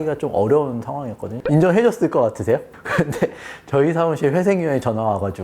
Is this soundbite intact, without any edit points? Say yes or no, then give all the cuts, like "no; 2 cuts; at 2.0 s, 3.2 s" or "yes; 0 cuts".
no; 2 cuts; at 1.4 s, 2.8 s